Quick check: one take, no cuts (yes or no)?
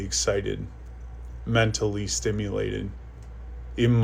yes